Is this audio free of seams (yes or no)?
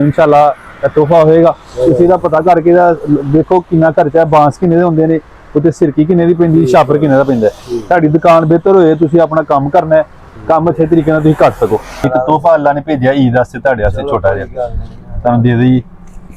no